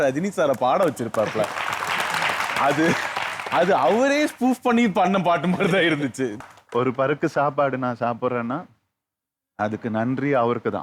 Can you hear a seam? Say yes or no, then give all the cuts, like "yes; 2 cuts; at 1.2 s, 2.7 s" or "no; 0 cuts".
yes; 1 cut; at 6.4 s